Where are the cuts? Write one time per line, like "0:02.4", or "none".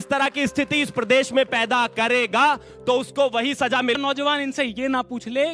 0:04.0